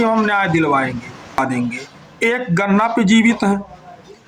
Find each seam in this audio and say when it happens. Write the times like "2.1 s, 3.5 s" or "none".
1.4 s